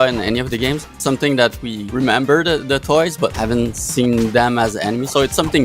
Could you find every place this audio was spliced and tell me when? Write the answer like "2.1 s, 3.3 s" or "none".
0.9 s, 1.7 s, 3.3 s